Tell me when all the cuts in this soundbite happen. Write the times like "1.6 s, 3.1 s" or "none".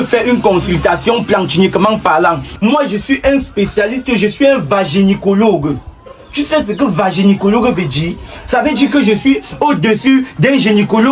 2.5 s